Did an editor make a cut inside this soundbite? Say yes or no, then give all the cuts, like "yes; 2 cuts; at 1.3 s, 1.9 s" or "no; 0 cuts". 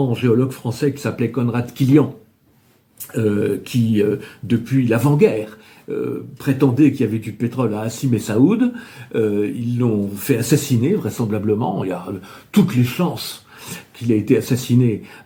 no; 0 cuts